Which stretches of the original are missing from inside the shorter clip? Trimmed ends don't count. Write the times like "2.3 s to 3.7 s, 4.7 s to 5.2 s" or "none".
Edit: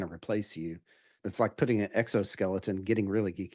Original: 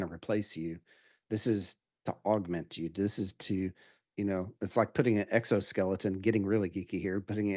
1.2 s to 4.5 s